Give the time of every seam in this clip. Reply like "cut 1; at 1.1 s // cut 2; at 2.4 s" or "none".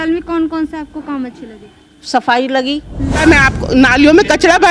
cut 1; at 3.2 s